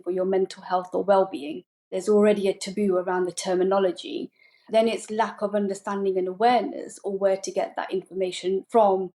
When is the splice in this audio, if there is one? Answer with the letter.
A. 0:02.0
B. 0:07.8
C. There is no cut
A